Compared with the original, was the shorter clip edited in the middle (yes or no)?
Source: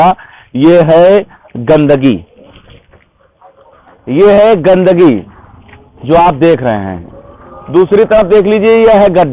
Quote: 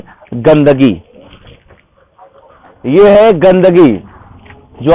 no